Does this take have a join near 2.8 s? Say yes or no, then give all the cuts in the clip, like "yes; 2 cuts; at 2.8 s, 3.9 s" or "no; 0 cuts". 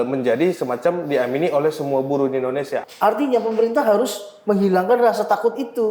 yes; 1 cut; at 2.8 s